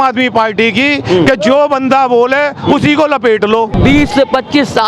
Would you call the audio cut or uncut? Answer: cut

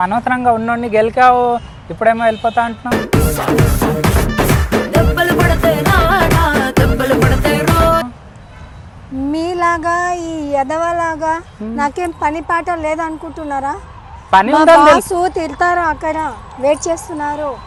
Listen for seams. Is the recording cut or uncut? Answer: uncut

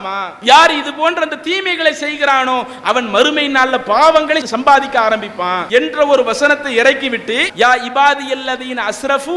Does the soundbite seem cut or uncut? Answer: cut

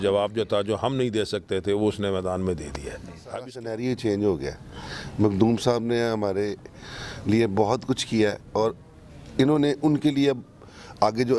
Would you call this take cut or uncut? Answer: cut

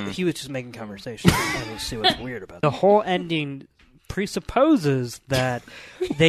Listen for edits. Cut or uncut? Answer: cut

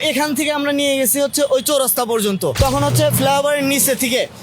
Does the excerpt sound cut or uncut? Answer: cut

